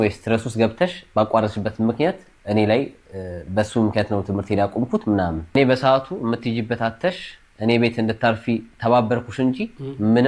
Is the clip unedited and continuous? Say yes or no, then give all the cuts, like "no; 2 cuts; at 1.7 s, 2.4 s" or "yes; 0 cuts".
yes; 0 cuts